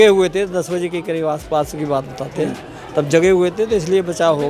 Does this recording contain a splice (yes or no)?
no